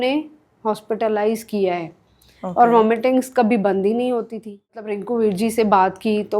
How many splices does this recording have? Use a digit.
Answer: 1